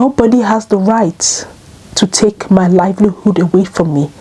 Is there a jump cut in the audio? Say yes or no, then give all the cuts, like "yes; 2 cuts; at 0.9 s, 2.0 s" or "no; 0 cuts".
no; 0 cuts